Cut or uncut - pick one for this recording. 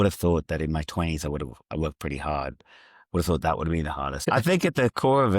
cut